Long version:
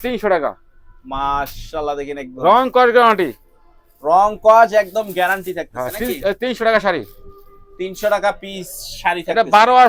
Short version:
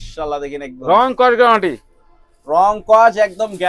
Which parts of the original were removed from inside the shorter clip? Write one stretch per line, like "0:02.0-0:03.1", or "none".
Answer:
none